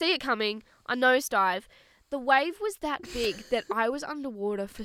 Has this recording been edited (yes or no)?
no